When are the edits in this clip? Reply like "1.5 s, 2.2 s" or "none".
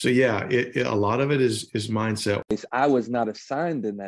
2.5 s

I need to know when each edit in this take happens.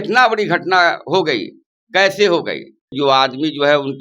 2.9 s

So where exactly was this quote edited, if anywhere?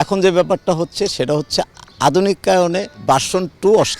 2.9 s

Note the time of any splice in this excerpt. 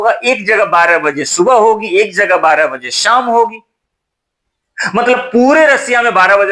none

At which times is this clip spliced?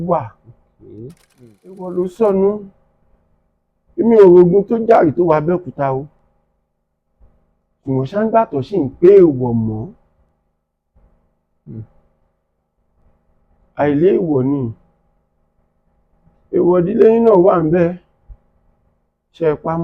1.9 s

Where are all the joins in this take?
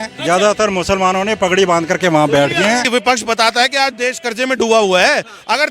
2.9 s

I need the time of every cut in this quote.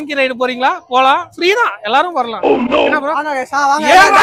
none

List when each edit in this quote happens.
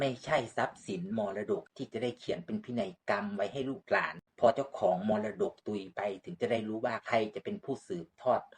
1.7 s, 4.2 s

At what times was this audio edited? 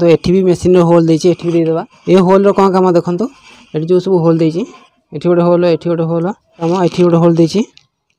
1.9 s, 6.7 s

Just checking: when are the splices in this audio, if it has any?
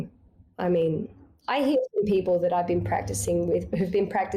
1.1 s

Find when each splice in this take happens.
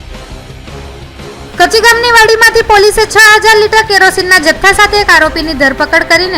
1.5 s

